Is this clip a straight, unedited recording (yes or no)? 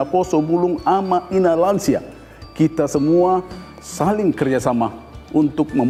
yes